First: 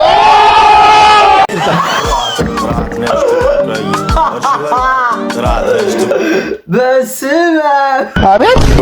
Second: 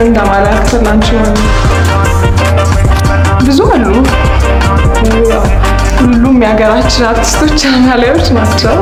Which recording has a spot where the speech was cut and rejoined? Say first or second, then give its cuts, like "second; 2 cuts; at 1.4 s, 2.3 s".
first; 1 cut; at 6.1 s